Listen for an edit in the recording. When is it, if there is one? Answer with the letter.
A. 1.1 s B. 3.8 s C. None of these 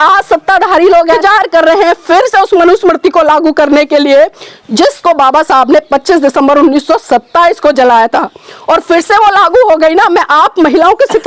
A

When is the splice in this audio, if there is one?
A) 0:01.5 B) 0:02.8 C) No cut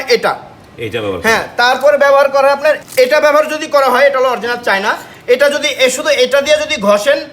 B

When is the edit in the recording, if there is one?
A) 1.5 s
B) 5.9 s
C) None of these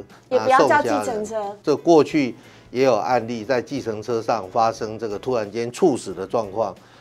A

